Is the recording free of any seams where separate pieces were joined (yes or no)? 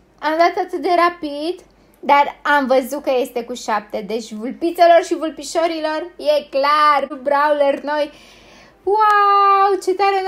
no